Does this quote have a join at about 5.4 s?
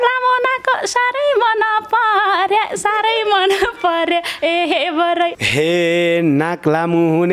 yes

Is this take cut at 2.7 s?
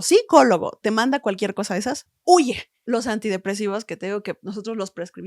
yes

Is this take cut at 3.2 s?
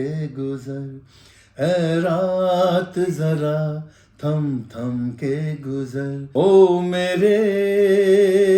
no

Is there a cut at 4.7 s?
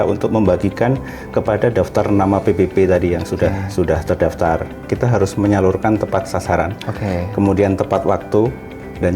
yes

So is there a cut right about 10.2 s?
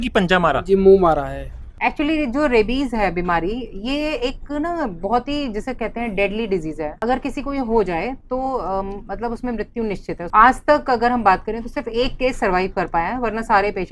yes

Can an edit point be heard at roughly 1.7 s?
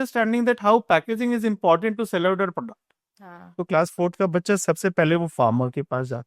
no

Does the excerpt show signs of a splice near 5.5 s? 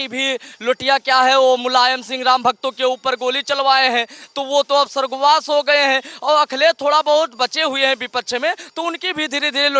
no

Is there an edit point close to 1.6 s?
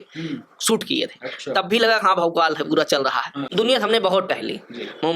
no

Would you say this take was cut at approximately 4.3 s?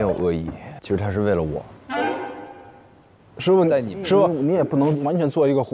yes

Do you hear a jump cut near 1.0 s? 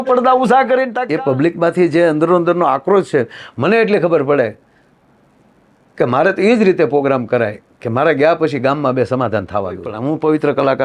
yes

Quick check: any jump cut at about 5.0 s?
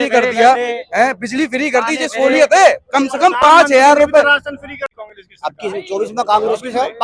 yes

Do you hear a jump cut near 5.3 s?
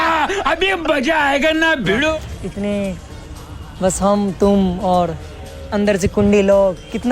no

